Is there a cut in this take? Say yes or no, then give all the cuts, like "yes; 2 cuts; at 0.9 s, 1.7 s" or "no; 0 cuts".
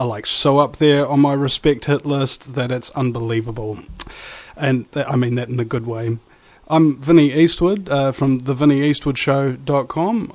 yes; 1 cut; at 8.7 s